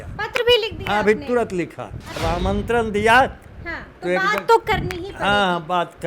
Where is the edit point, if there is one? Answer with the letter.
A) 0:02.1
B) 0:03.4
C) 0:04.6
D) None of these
A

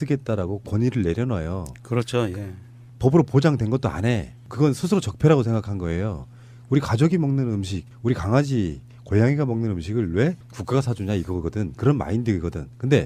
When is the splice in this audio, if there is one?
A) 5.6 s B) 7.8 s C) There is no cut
A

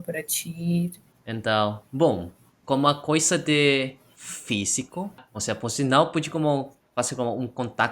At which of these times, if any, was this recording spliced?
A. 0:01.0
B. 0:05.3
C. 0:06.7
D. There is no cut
A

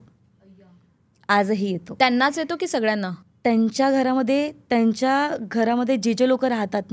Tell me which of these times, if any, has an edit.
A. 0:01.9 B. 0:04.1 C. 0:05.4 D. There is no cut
D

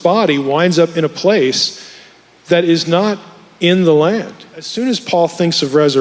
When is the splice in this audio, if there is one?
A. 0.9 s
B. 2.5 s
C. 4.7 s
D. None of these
C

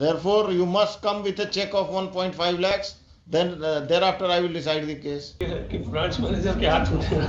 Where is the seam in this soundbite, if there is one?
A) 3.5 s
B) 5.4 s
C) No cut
B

